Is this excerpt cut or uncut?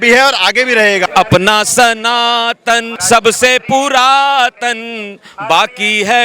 cut